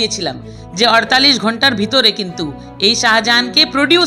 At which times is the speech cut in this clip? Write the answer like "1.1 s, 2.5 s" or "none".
none